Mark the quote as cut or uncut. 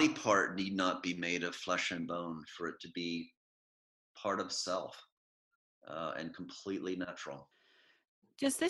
uncut